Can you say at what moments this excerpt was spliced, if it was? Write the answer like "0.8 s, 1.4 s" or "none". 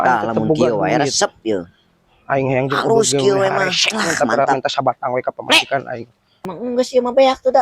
6.0 s